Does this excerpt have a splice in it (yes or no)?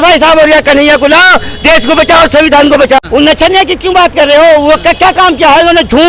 yes